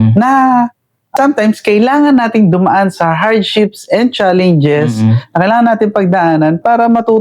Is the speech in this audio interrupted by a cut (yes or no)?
yes